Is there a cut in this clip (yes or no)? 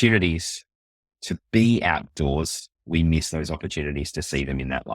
no